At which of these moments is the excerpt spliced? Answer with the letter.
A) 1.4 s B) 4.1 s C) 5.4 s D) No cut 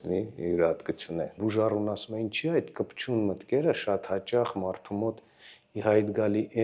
A